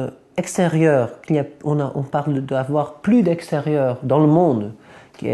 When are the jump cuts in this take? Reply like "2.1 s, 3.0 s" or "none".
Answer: none